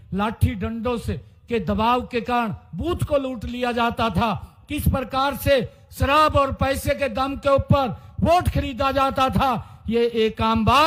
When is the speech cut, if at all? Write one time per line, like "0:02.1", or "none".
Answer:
none